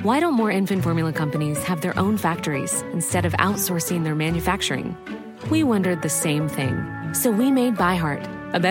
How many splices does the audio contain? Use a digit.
0